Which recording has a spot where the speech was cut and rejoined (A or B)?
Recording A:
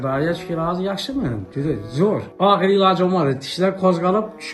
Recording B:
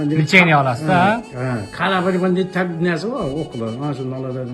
A